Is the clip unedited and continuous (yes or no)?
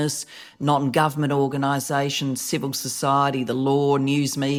yes